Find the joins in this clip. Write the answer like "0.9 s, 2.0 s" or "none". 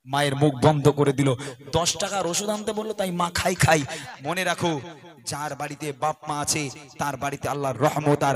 4.0 s